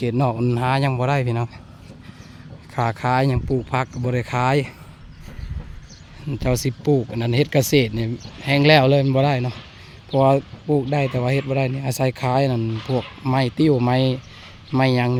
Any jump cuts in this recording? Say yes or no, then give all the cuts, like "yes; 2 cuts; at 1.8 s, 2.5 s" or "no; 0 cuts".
no; 0 cuts